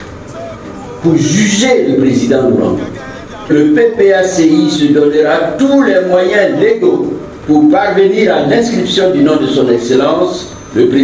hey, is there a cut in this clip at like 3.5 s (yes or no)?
yes